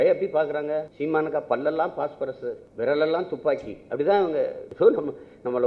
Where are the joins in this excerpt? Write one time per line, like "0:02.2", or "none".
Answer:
0:00.9
0:02.6
0:04.6